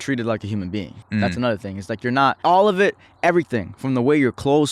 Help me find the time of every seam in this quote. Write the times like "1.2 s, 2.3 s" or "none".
1.0 s, 2.4 s